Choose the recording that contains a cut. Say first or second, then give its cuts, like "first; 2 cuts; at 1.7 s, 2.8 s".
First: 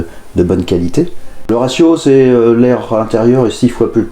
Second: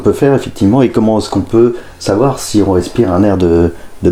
first; 1 cut; at 1.4 s